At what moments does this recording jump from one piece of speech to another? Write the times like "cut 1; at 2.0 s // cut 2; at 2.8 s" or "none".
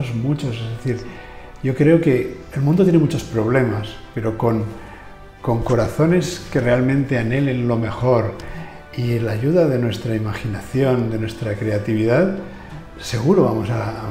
none

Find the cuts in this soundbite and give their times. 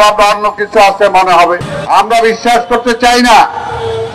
cut 1; at 1.7 s

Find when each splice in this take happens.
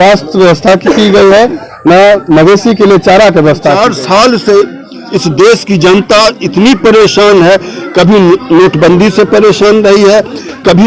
cut 1; at 3.8 s

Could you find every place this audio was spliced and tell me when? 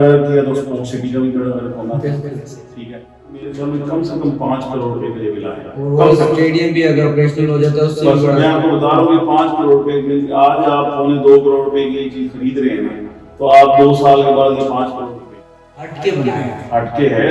cut 1; at 3.4 s // cut 2; at 15.5 s

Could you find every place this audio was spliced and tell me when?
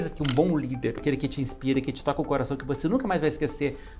cut 1; at 1.0 s

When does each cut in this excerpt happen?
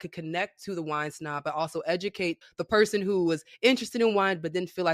cut 1; at 2.4 s

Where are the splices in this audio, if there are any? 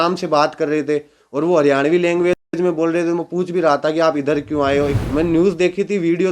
cut 1; at 5.0 s

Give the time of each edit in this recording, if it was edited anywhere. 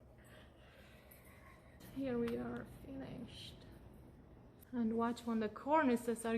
cut 1; at 1.8 s // cut 2; at 4.6 s

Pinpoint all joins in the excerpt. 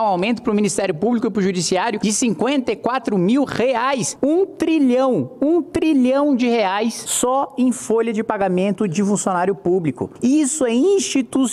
cut 1; at 2.0 s // cut 2; at 4.1 s // cut 3; at 7.0 s // cut 4; at 10.1 s

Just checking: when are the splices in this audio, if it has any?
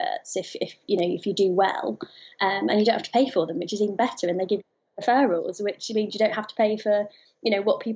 none

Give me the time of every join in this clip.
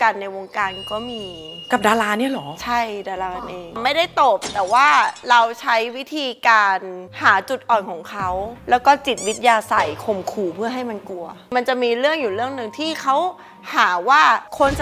none

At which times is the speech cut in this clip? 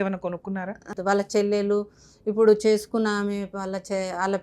cut 1; at 0.9 s

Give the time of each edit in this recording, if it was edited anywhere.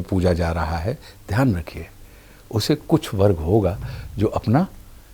none

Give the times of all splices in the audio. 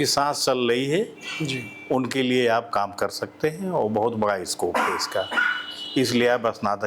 none

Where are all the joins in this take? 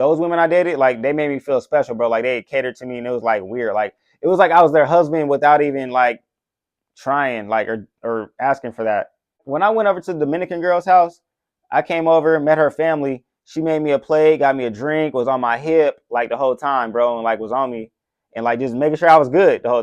cut 1; at 9.4 s

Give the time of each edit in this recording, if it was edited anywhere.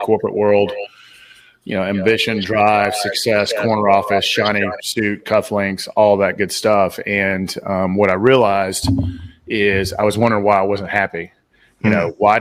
none

